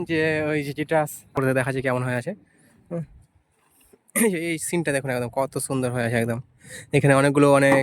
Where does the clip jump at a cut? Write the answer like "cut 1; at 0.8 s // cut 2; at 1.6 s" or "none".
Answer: cut 1; at 1.3 s